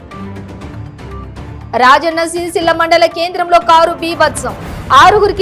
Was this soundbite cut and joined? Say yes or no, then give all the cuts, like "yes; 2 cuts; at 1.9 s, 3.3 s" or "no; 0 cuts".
yes; 1 cut; at 0.9 s